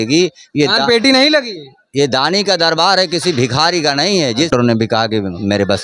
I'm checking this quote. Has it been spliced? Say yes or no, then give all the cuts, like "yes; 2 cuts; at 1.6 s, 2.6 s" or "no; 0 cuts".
yes; 1 cut; at 4.5 s